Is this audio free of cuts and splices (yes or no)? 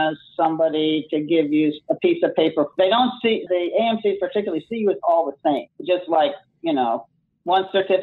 no